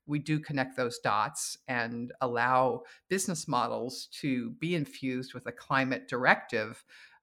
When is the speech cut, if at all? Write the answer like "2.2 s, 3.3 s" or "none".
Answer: none